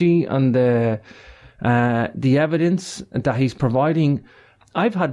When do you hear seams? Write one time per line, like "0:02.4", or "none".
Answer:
0:01.0